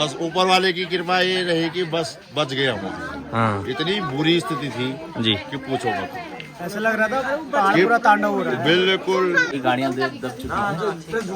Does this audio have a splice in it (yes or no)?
yes